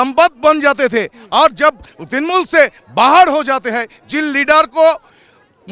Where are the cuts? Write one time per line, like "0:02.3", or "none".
none